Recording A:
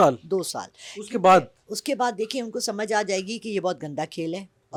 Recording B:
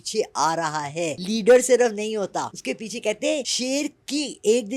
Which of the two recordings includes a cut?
B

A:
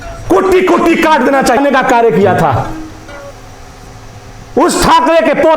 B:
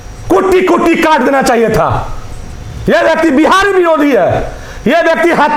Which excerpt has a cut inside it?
A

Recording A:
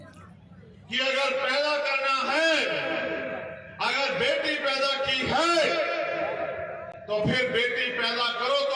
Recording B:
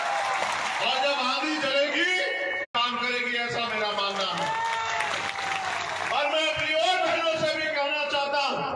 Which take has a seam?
B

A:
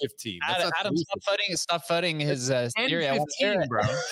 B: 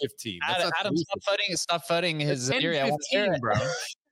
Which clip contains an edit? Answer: B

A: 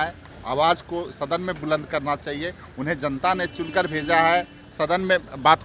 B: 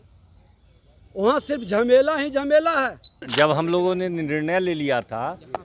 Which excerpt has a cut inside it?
B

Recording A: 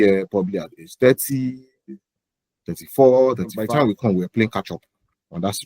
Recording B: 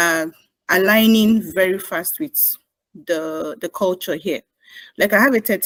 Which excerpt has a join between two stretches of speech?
A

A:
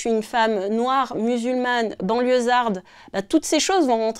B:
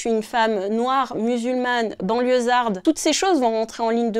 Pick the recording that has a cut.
B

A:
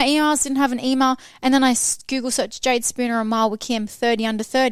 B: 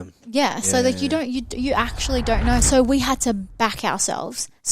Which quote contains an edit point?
B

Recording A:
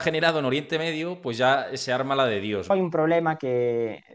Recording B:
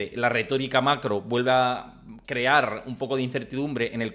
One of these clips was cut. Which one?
A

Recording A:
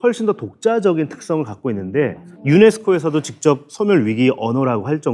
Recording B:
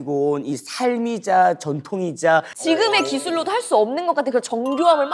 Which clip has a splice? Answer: B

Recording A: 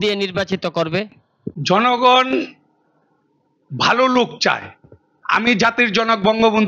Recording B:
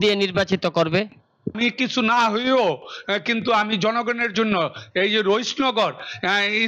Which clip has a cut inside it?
B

